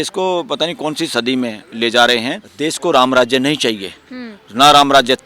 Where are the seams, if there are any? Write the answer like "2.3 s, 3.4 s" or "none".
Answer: 2.4 s